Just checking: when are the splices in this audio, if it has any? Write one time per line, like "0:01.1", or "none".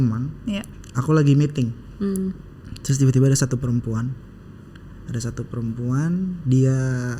none